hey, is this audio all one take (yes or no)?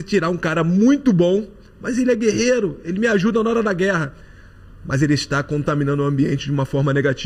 yes